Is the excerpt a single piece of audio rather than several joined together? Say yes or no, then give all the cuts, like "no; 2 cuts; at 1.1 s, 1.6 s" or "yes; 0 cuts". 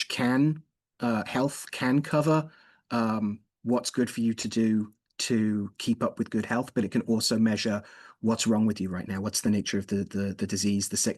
yes; 0 cuts